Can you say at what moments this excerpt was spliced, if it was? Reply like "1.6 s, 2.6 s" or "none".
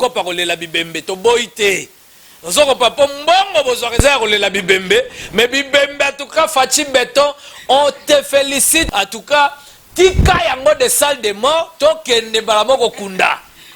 8.9 s